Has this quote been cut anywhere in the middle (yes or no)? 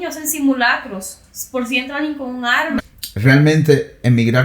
yes